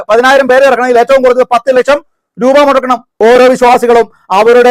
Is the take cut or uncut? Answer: cut